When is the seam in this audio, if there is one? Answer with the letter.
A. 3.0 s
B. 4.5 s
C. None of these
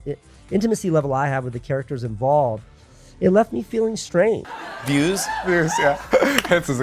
B